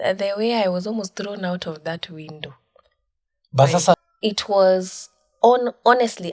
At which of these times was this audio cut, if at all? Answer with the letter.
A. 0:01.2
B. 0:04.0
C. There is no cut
B